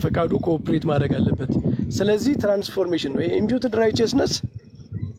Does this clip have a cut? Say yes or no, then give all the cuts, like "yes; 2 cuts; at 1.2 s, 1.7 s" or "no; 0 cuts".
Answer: no; 0 cuts